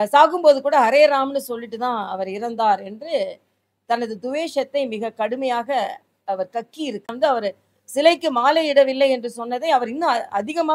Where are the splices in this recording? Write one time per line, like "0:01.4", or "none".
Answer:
0:07.1